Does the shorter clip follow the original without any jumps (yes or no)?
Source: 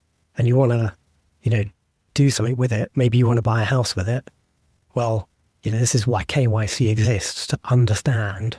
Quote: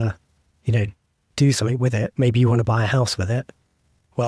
yes